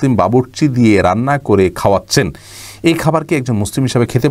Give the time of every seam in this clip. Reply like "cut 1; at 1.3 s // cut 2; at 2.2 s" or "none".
none